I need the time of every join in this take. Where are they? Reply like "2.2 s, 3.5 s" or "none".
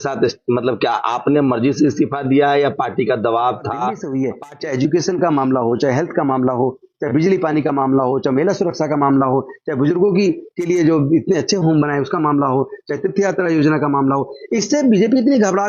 4.0 s